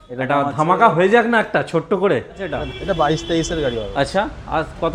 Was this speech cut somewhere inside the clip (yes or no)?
yes